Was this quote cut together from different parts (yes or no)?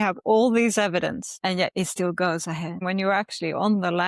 yes